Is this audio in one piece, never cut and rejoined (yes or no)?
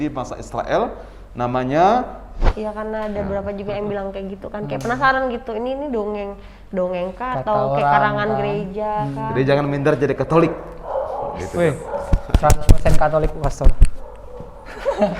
no